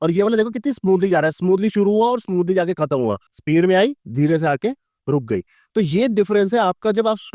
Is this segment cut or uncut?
cut